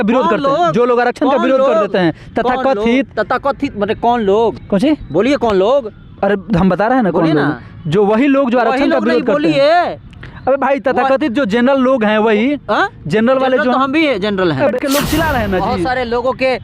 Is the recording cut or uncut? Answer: cut